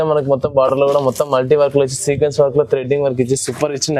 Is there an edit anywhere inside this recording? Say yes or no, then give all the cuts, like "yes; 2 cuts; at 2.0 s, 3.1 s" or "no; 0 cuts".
no; 0 cuts